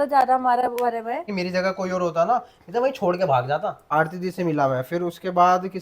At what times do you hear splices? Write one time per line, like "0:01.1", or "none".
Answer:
0:01.4
0:03.9